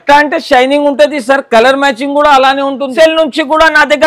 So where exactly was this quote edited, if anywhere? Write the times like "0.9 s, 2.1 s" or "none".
2.9 s